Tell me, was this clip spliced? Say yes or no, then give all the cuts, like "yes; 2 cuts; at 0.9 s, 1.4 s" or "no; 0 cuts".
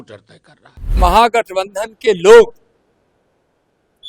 yes; 1 cut; at 1.0 s